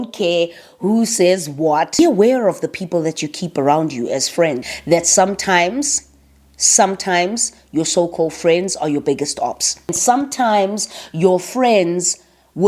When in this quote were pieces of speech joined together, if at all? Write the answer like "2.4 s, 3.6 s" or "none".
2.0 s, 4.7 s, 10.0 s